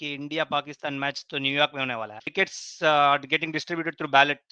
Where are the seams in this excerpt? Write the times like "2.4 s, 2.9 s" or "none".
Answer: 2.3 s